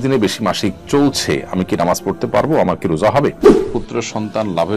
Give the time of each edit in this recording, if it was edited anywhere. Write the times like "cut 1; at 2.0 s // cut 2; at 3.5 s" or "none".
cut 1; at 3.4 s

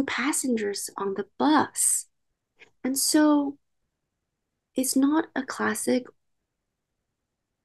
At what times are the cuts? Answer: none

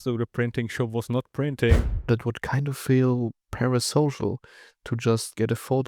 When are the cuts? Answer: cut 1; at 1.9 s

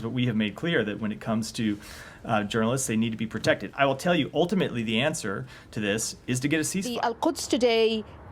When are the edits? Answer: cut 1; at 6.9 s

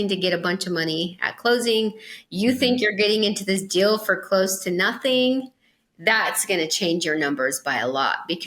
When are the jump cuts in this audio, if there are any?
none

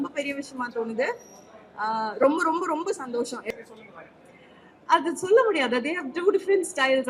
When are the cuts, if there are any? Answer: cut 1; at 3.5 s

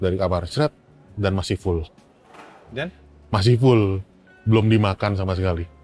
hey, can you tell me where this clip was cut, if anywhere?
none

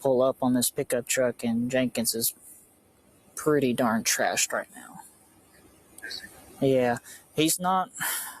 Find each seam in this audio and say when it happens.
none

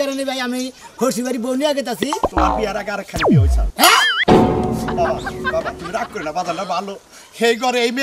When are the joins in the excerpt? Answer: cut 1; at 2.1 s

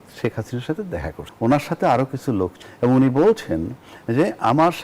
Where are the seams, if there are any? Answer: cut 1; at 1.2 s // cut 2; at 2.6 s

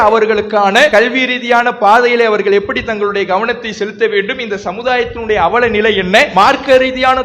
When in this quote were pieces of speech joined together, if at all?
cut 1; at 0.9 s // cut 2; at 6.3 s

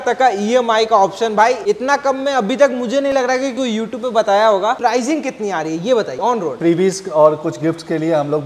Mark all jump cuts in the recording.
cut 1; at 4.8 s // cut 2; at 6.6 s

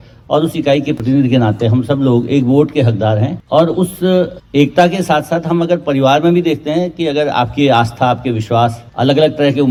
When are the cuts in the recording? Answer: none

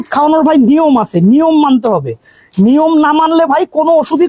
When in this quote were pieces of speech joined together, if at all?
none

